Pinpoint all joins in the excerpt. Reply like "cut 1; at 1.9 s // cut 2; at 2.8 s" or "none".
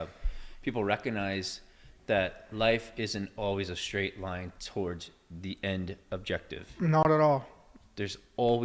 none

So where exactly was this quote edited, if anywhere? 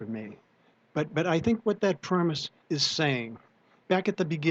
cut 1; at 2.5 s

